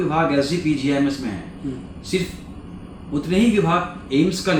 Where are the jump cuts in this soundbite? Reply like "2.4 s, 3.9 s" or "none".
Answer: none